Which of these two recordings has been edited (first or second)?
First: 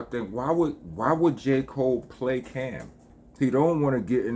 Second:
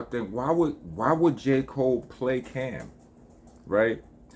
first